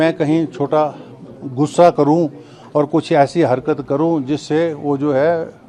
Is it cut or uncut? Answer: uncut